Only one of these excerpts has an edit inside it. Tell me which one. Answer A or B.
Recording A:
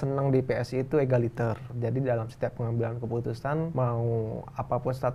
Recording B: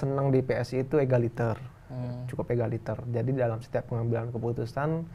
A